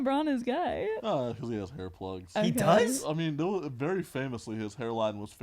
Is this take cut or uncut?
cut